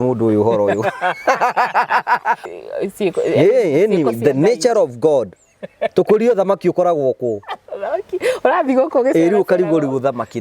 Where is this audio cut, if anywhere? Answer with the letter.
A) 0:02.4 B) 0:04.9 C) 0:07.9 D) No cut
A